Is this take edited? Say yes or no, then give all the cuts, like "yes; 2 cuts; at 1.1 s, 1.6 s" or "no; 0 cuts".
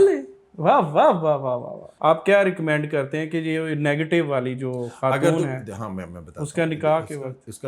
yes; 1 cut; at 1.8 s